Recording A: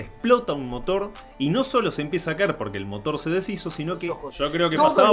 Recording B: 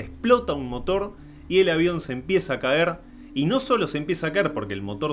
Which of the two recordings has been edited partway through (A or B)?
A